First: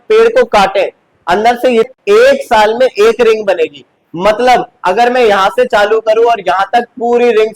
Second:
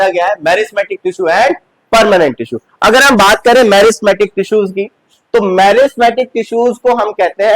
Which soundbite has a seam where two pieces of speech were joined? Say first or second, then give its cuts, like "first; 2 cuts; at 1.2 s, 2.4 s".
first; 1 cut; at 1.9 s